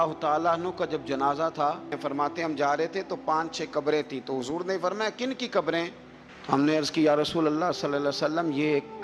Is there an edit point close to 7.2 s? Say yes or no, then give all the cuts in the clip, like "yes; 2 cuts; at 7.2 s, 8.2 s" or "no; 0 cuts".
no; 1 cut; at 2.0 s